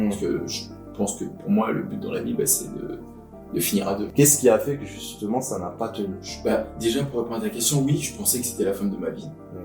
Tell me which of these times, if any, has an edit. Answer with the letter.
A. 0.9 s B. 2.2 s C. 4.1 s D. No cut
C